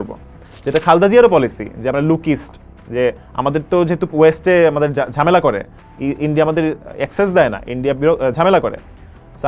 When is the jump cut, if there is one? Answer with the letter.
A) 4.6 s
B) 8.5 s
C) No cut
C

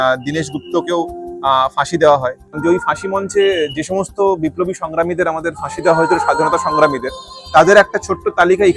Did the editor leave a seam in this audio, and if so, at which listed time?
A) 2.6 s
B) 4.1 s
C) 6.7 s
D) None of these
A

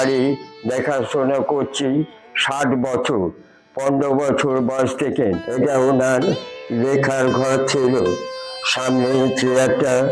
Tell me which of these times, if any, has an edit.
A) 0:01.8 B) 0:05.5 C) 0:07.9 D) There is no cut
B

